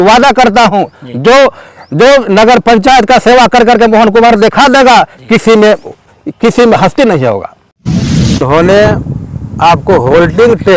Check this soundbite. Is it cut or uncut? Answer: cut